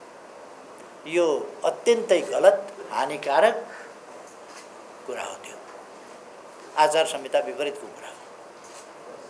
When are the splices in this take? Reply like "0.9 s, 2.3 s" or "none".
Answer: none

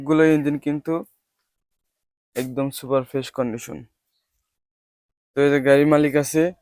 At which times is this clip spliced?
none

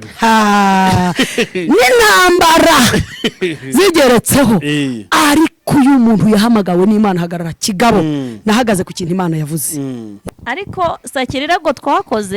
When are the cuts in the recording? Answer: 10.1 s

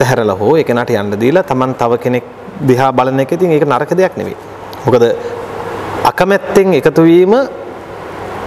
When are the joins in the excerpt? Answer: none

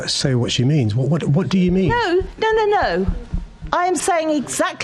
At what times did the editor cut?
none

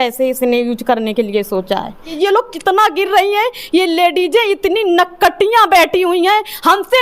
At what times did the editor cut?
2.1 s

